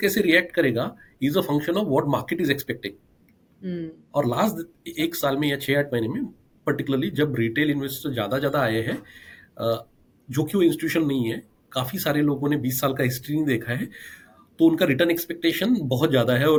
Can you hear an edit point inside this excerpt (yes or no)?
no